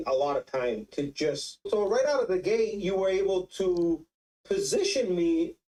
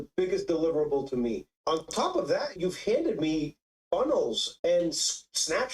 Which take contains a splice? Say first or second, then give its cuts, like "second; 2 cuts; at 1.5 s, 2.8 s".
second; 1 cut; at 1.5 s